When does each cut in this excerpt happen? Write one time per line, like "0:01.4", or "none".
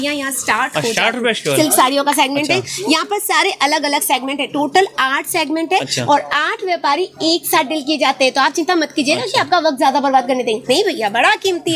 0:01.5